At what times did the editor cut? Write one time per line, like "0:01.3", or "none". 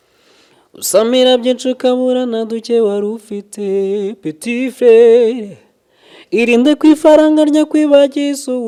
none